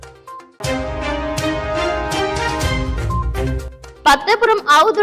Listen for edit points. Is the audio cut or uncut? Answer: cut